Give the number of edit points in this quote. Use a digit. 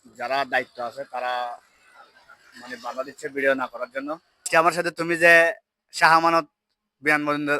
1